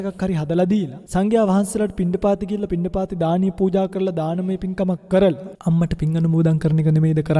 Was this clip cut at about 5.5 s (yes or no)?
yes